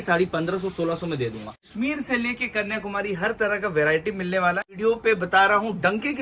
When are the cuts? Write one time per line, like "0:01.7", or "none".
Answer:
0:01.7
0:04.7